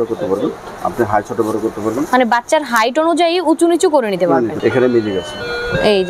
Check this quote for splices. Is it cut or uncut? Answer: cut